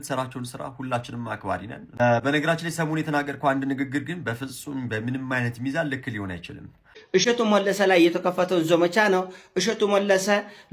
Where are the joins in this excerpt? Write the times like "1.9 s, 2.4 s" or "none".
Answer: 2.0 s, 6.9 s